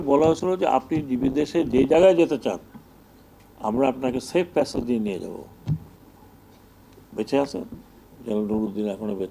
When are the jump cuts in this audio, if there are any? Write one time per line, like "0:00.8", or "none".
none